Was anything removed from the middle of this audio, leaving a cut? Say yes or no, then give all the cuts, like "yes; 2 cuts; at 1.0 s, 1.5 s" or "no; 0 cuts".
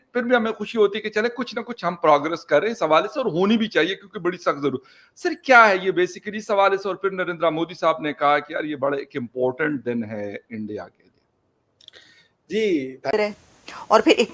yes; 1 cut; at 13.1 s